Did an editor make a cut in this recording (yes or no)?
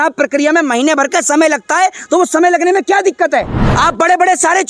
yes